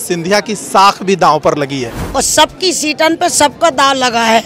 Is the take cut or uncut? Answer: cut